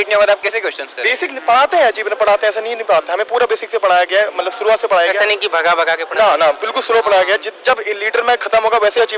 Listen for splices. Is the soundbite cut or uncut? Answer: uncut